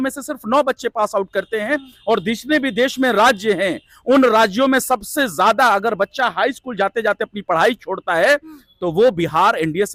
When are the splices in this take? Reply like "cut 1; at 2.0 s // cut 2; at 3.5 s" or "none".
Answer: none